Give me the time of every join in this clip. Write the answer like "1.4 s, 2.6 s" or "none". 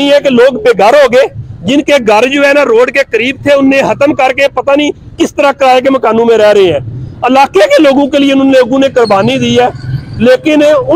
none